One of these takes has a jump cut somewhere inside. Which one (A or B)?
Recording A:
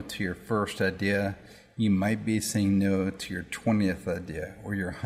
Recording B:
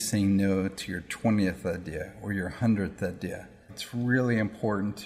B